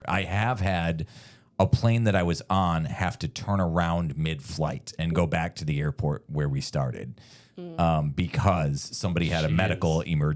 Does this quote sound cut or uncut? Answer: uncut